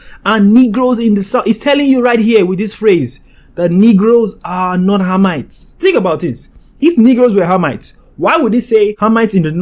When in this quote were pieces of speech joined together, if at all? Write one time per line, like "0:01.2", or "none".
none